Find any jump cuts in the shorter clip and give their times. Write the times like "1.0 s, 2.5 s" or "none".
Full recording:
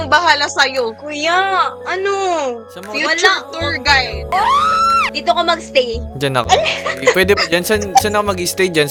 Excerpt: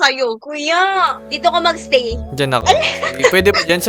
1.2 s